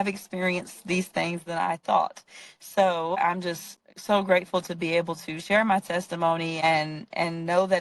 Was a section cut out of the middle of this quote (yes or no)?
yes